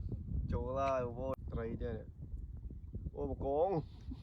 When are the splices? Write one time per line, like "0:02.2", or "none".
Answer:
0:01.4

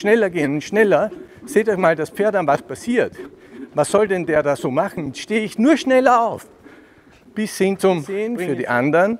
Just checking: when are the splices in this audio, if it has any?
0:08.3

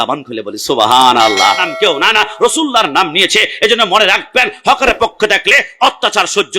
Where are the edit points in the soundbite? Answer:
0:01.7

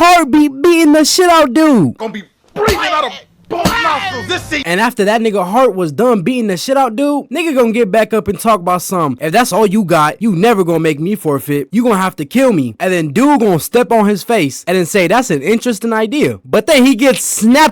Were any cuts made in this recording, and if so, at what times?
0:16.4

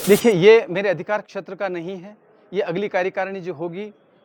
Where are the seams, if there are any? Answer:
none

